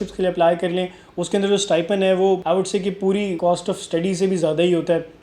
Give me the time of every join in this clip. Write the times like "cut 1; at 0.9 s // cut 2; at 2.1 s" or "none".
cut 1; at 2.4 s // cut 2; at 3.4 s